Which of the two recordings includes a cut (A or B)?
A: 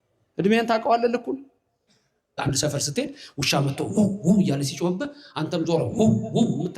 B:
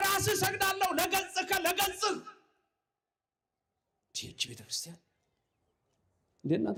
A